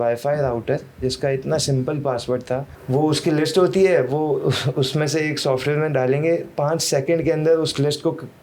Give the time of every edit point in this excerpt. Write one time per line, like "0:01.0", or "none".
0:02.7